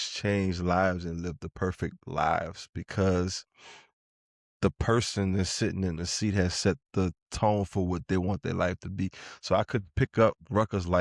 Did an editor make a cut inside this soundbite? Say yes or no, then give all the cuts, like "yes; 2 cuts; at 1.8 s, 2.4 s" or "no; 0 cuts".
no; 0 cuts